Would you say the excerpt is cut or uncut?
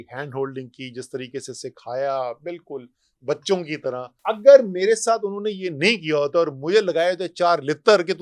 cut